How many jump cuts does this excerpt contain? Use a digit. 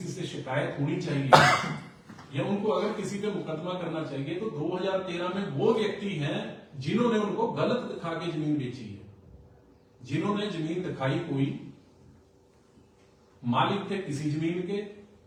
0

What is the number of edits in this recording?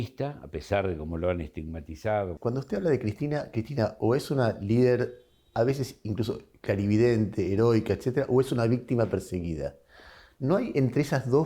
1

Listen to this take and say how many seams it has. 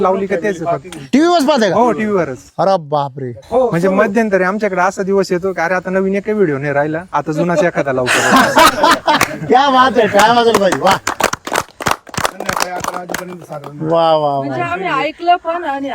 1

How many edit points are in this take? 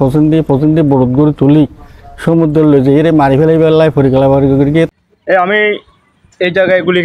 1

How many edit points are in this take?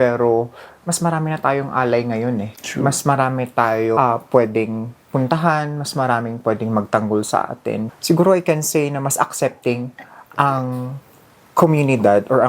2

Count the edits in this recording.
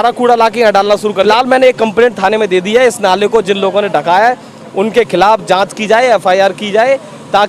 1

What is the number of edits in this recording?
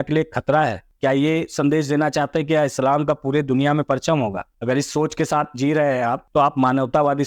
3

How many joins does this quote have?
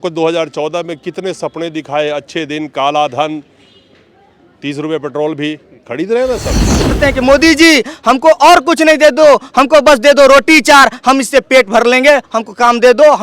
1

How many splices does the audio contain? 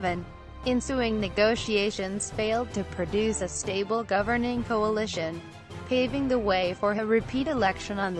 0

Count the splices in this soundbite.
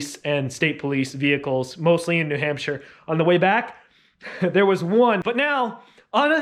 1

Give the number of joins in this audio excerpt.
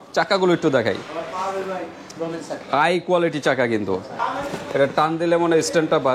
1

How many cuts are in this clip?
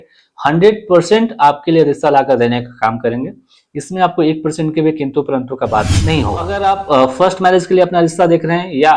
1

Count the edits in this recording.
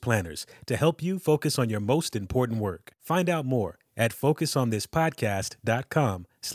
1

